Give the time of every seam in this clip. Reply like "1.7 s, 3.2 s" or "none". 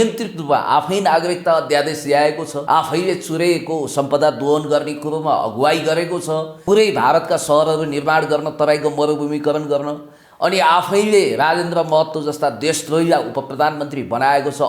2.5 s, 6.5 s

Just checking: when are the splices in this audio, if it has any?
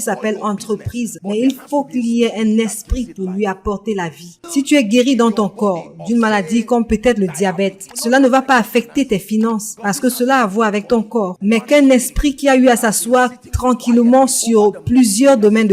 4.3 s, 7.9 s, 9.7 s, 11.3 s

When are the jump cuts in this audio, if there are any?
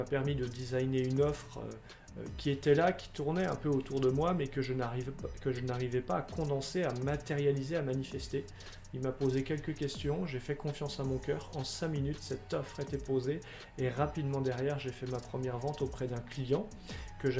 none

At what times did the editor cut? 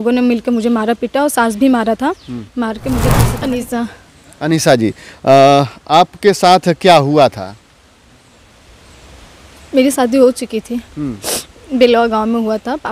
3.2 s

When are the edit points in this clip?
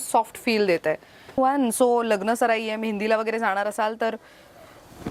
1.4 s

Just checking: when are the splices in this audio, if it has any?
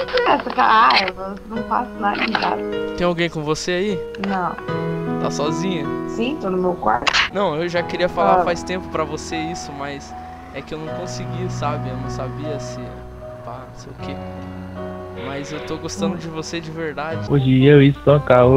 7.2 s, 17.2 s

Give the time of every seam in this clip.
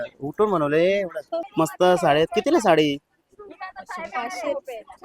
1.4 s

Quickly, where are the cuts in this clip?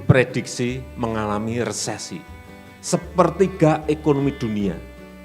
none

